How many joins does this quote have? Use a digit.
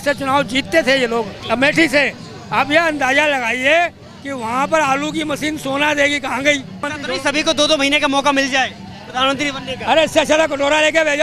2